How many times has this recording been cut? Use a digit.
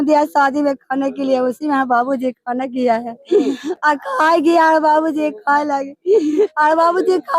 0